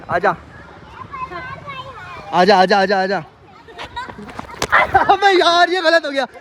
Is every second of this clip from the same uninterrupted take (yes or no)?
yes